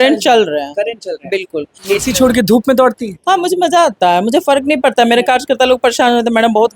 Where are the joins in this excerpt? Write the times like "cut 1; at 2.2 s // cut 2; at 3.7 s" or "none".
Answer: cut 1; at 1.8 s